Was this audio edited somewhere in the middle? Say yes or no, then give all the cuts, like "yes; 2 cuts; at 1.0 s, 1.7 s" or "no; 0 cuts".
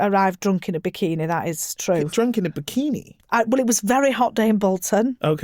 yes; 1 cut; at 2.1 s